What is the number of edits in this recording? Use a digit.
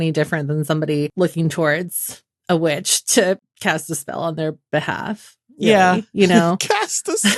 2